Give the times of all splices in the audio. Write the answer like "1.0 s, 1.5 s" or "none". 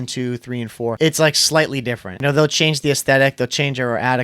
1.0 s, 2.2 s